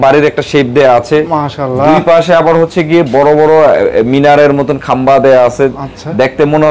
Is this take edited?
no; 0 cuts

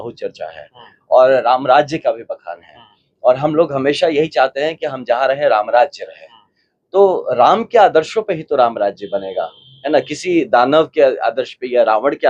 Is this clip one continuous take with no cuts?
yes; 0 cuts

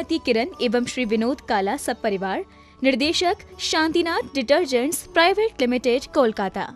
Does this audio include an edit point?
no; 0 cuts

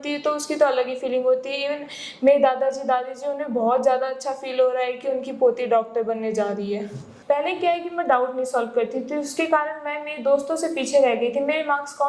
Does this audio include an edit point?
yes; 1 cut; at 7.1 s

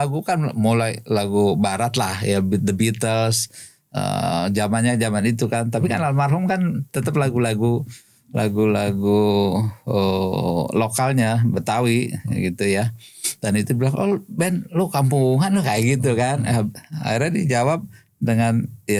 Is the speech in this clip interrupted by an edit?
no; 0 cuts

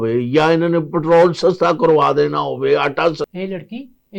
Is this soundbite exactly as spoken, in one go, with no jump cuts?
no; 1 cut; at 3.2 s

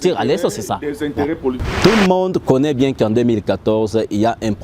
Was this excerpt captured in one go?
no; 1 cut; at 1.6 s

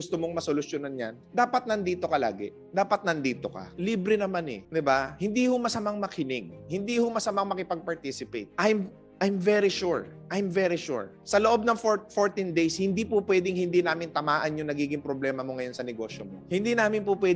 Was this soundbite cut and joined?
no; 0 cuts

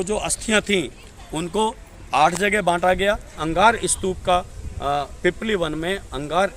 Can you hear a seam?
yes; 1 cut; at 3.4 s

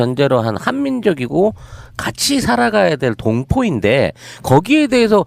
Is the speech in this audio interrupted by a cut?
no; 0 cuts

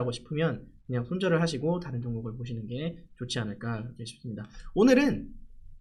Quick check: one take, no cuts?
yes; 0 cuts

